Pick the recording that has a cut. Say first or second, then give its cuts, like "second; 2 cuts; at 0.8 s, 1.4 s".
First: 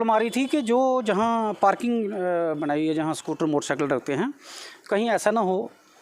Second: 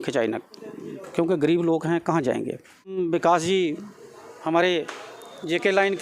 second; 1 cut; at 2.9 s